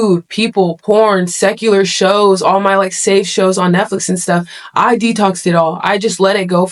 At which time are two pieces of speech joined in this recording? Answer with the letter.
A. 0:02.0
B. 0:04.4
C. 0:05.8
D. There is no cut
D